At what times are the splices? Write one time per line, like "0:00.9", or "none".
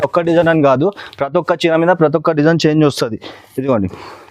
none